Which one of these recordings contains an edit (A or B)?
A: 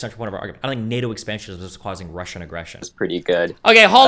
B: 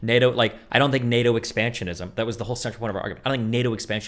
A